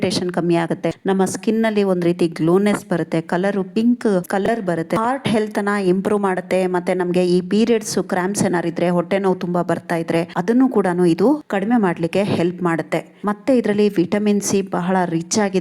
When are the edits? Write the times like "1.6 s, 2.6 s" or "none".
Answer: 4.9 s